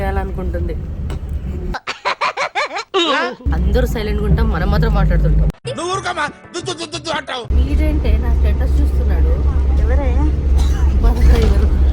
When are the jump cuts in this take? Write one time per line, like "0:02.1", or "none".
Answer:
0:03.4
0:07.5